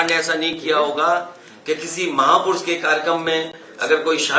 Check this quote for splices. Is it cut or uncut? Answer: uncut